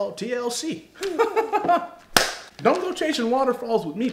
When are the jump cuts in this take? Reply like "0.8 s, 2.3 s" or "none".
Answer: 2.4 s